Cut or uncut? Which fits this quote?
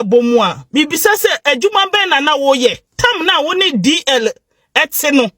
cut